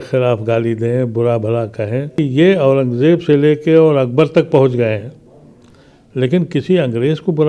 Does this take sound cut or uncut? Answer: cut